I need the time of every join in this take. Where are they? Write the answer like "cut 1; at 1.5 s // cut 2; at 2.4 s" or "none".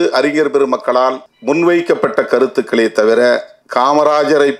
cut 1; at 1.3 s // cut 2; at 3.6 s